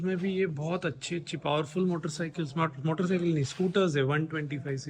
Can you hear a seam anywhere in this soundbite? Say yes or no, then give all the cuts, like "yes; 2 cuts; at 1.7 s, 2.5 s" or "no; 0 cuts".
no; 0 cuts